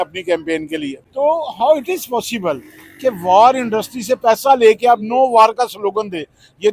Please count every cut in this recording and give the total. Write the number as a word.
one